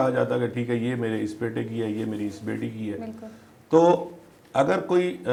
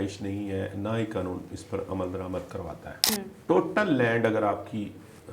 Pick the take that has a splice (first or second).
second